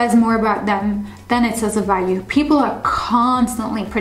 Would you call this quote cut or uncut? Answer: uncut